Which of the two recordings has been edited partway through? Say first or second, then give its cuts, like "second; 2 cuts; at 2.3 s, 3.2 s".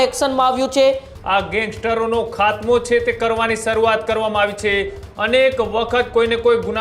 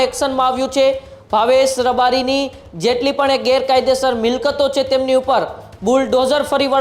first; 2 cuts; at 1.1 s, 5.0 s